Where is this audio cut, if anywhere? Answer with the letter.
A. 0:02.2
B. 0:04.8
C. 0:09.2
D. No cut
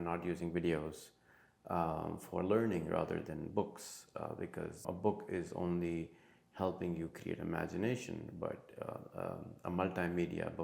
B